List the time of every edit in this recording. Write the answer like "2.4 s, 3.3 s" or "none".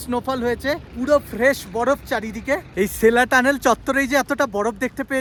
none